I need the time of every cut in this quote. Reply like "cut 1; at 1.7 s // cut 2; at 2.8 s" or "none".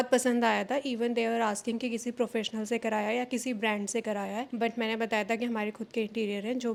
none